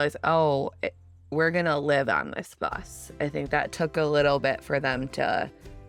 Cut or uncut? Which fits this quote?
uncut